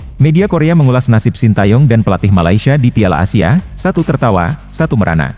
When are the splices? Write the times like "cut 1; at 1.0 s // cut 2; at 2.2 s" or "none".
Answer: none